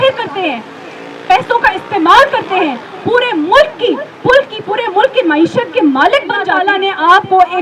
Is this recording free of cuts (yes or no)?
no